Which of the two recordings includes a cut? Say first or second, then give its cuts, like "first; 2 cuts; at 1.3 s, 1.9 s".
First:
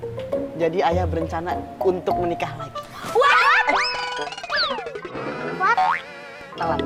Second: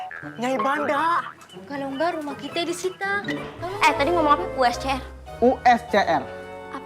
second; 1 cut; at 3.6 s